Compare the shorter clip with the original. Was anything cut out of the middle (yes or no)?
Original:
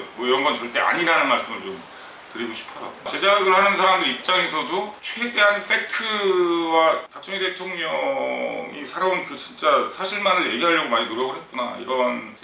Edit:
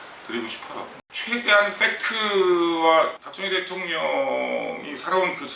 yes